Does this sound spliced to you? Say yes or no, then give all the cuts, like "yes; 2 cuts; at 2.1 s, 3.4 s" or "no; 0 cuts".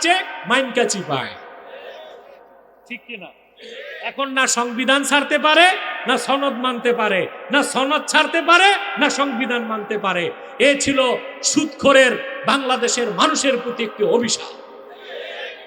no; 0 cuts